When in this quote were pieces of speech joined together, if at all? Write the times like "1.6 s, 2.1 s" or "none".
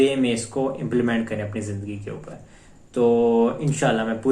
none